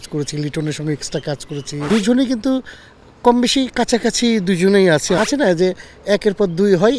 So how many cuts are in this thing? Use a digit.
2